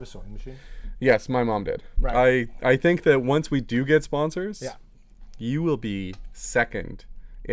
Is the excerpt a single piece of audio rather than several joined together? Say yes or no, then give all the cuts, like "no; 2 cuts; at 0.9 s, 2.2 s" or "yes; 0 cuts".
no; 1 cut; at 1.9 s